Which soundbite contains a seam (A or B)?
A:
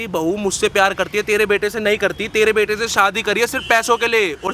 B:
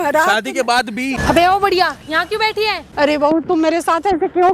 B